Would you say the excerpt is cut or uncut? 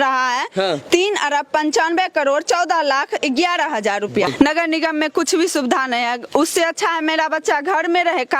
cut